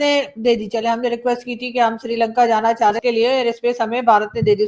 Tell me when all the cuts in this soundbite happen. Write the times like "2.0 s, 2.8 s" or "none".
3.0 s